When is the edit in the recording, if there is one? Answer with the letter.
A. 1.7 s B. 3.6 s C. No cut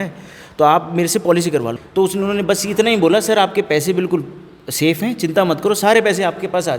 A